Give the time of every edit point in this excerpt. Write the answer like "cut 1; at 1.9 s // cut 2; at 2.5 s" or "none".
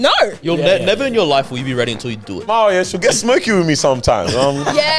cut 1; at 2.5 s